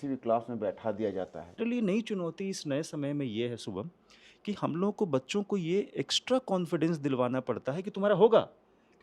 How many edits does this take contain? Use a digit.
1